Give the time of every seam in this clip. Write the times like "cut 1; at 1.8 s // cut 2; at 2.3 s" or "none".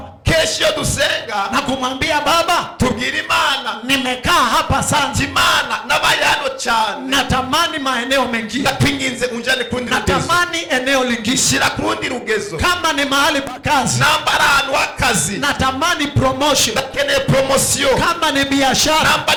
none